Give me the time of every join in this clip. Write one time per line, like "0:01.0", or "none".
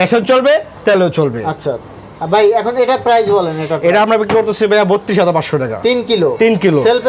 none